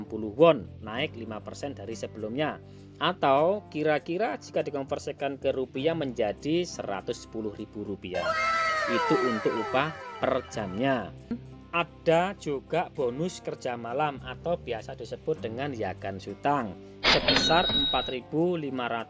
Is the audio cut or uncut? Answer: cut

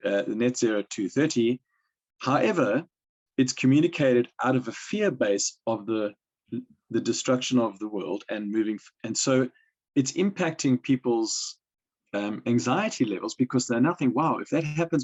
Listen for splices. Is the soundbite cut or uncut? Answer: uncut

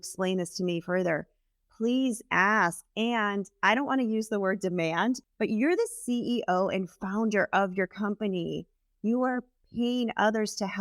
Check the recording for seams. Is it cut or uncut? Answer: cut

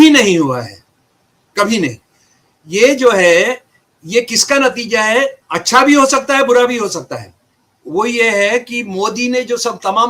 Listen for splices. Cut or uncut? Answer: cut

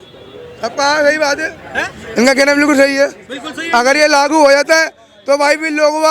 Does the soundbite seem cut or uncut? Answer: uncut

